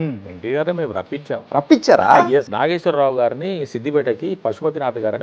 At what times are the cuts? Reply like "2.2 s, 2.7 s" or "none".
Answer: 1.4 s, 2.5 s